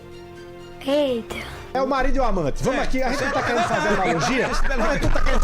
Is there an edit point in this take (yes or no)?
yes